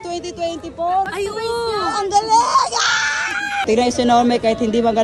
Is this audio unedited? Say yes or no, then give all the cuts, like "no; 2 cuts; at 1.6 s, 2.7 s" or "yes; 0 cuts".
no; 2 cuts; at 1.1 s, 3.7 s